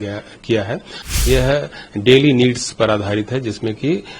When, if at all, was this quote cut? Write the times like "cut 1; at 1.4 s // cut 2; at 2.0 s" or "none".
cut 1; at 1.1 s